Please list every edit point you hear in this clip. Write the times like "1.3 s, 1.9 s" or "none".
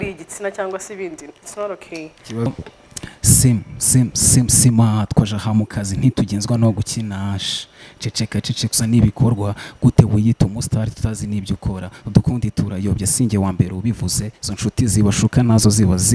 2.5 s